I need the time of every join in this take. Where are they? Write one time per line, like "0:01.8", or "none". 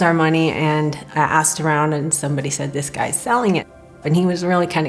0:03.9

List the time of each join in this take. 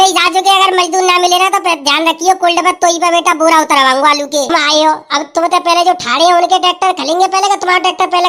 0:04.5

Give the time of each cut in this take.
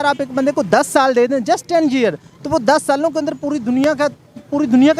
none

